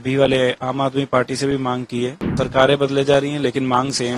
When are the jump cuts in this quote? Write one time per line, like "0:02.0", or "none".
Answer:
0:02.2